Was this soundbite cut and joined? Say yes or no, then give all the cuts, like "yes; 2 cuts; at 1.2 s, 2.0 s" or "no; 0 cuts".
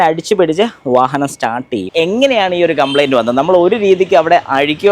yes; 1 cut; at 1.9 s